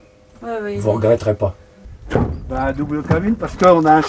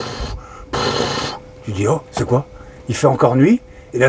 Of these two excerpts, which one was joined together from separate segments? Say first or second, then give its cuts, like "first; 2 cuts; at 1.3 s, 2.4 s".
first; 1 cut; at 1.8 s